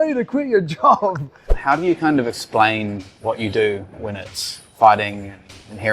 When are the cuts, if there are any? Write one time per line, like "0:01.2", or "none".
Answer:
0:01.5